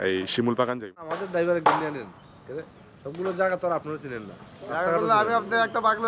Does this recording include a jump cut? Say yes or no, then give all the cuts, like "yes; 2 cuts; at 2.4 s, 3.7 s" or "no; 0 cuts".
yes; 1 cut; at 1.2 s